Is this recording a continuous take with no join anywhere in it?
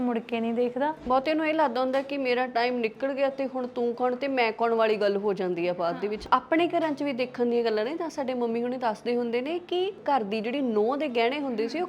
no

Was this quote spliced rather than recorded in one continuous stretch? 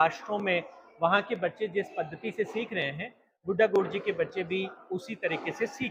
no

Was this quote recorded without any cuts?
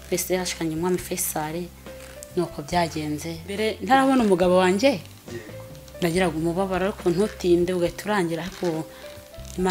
no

